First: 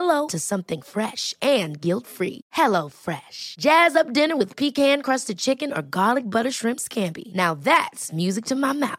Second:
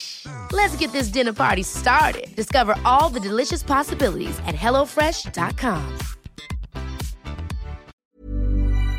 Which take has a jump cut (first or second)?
second